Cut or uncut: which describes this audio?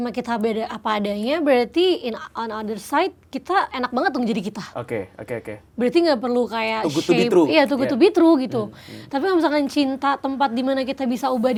uncut